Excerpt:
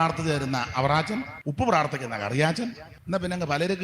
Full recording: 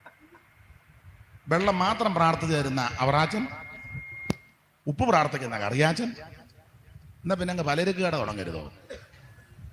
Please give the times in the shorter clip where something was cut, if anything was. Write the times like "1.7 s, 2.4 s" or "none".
1.4 s, 2.9 s